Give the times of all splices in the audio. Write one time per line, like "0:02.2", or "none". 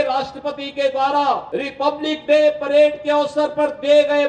0:01.4